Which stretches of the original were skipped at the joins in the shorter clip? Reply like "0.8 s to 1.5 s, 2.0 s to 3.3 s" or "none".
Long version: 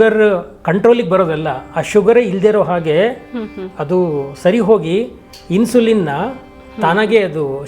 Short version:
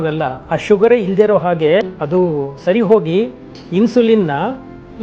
3.2 s to 3.7 s